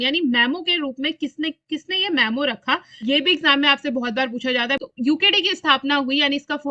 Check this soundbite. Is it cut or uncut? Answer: cut